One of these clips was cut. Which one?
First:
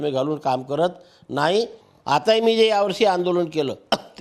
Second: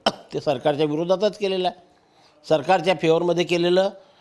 first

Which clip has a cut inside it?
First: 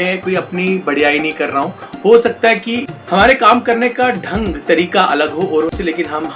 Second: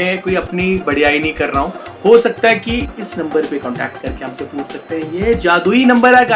second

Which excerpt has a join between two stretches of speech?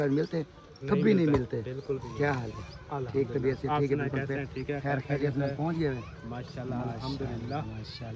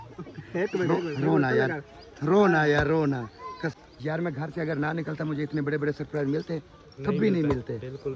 second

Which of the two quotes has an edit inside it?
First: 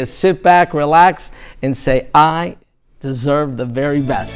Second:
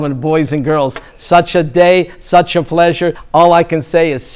second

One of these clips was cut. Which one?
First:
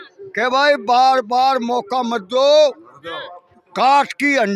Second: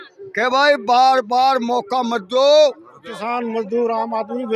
second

